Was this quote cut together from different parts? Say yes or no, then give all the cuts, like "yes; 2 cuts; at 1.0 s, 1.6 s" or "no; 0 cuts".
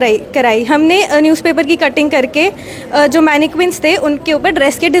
no; 0 cuts